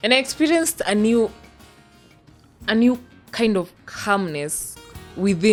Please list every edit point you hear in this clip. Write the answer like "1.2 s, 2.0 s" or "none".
none